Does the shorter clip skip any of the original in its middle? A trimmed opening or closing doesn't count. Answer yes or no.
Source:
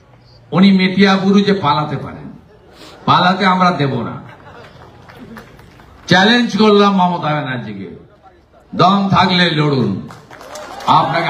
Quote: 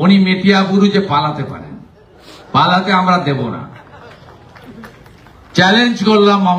no